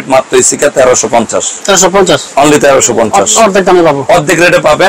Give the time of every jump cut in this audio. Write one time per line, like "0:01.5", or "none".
none